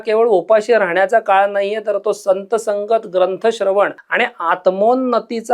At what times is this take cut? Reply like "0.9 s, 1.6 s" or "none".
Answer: 4.0 s

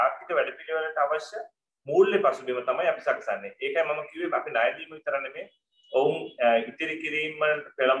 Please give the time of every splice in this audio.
none

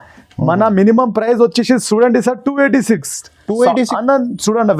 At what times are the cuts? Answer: 3.9 s

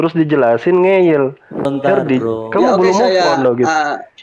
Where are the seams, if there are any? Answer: 1.7 s

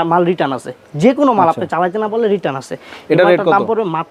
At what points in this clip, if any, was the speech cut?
none

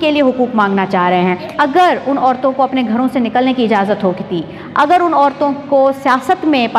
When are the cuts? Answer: 1.5 s

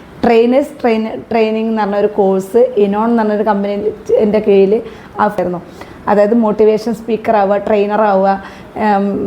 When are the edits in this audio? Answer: 5.4 s

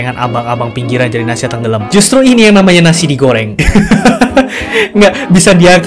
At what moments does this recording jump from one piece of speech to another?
1.8 s, 3.5 s

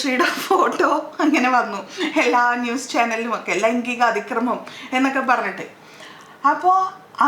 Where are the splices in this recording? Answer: none

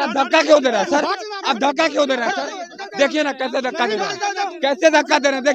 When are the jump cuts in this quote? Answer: none

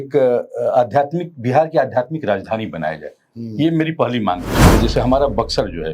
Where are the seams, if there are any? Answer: 4.5 s

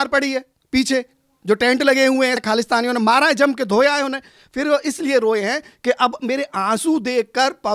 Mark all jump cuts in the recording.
2.4 s

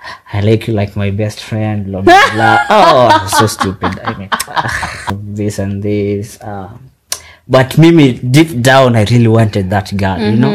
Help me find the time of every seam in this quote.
5.2 s

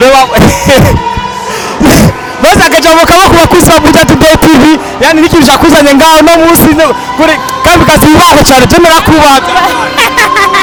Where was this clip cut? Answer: none

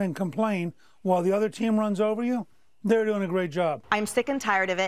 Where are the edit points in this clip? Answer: 3.8 s

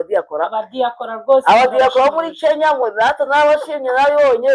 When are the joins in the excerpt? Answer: none

